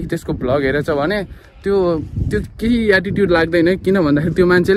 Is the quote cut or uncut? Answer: uncut